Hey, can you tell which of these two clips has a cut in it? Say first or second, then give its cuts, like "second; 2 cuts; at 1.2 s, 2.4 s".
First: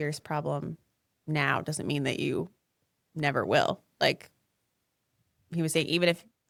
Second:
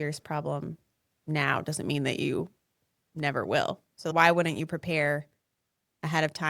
second; 1 cut; at 4.0 s